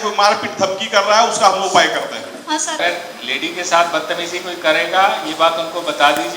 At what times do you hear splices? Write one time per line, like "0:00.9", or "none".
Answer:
0:02.8